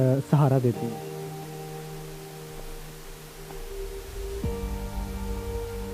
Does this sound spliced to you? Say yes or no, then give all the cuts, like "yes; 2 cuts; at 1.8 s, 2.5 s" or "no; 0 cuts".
yes; 1 cut; at 0.9 s